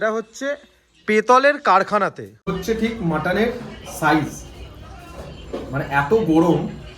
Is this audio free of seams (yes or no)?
no